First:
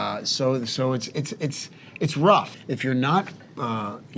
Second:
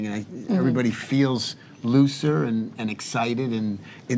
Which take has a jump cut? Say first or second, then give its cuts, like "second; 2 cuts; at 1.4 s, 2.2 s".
first; 1 cut; at 2.6 s